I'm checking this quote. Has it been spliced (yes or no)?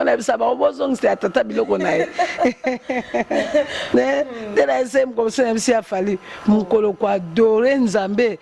no